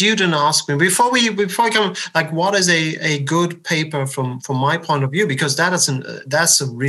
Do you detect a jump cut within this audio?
no; 0 cuts

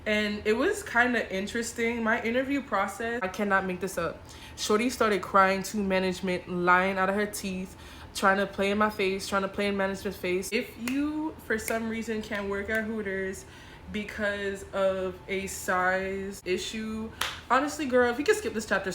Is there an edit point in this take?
yes; 3 cuts; at 3.2 s, 10.5 s, 16.4 s

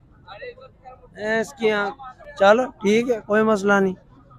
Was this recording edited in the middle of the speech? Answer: no; 0 cuts

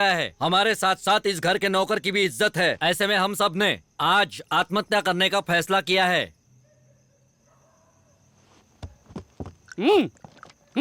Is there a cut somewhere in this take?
no; 0 cuts

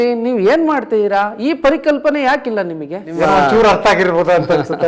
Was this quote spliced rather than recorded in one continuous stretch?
yes; 1 cut; at 3.1 s

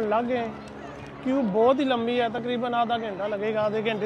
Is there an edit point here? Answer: no; 0 cuts

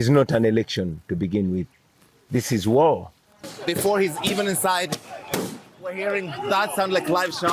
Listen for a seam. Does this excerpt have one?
yes; 1 cut; at 3.5 s

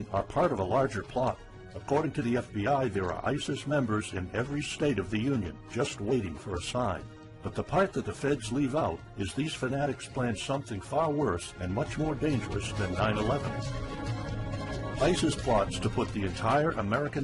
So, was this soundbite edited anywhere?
no; 0 cuts

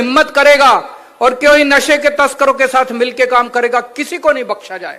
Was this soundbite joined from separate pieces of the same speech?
no; 0 cuts

